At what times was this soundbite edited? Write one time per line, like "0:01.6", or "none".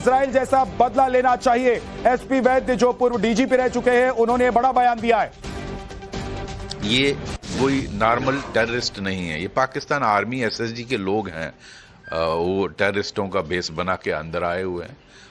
0:07.4